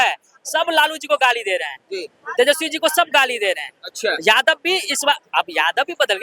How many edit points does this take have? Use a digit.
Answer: 0